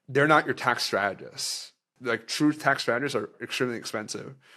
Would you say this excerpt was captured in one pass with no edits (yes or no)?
no